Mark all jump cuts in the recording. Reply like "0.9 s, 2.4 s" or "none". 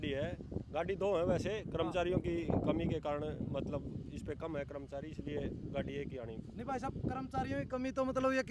none